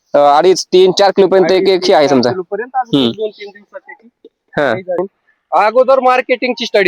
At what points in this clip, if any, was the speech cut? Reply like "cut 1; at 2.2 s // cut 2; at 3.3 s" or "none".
cut 1; at 5.0 s